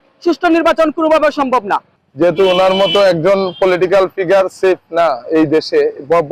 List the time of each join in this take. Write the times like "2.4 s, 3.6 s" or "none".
2.0 s